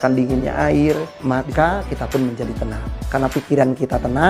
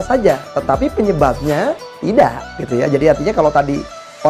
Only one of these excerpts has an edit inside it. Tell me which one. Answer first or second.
first